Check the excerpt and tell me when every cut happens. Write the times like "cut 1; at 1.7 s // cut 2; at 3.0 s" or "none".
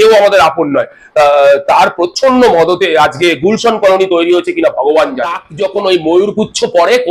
cut 1; at 5.5 s